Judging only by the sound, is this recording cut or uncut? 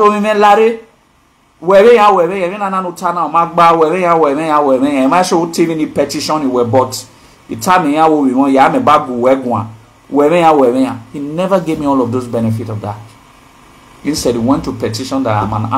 uncut